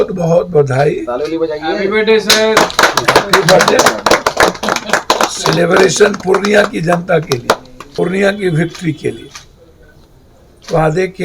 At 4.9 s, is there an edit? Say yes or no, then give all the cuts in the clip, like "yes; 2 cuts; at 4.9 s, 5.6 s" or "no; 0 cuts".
no; 1 cut; at 7.8 s